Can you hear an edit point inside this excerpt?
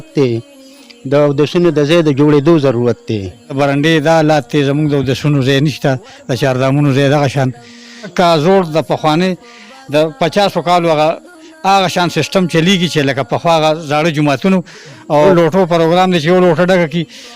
yes; 3 cuts; at 3.5 s, 8.1 s, 15.3 s

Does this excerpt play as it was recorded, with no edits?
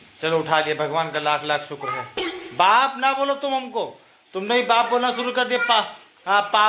yes; 0 cuts

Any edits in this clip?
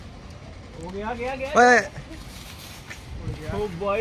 no; 0 cuts

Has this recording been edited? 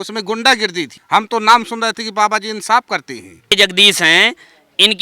yes; 2 cuts; at 1.0 s, 3.5 s

